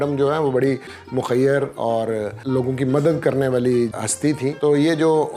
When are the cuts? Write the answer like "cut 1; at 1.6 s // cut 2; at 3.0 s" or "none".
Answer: cut 1; at 2.4 s // cut 2; at 4.0 s